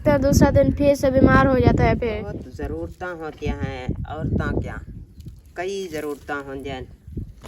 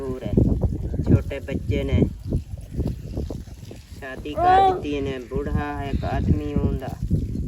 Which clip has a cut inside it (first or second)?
first